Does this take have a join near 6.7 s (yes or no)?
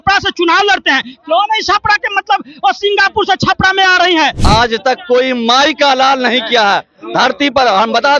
no